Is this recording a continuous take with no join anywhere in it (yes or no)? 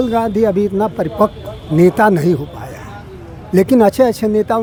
yes